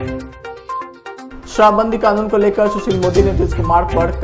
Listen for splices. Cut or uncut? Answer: cut